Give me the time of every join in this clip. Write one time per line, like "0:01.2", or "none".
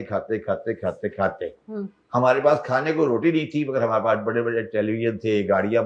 none